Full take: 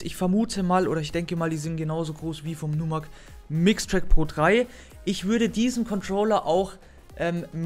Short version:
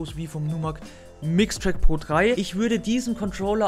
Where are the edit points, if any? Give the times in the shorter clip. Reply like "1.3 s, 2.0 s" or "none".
2.4 s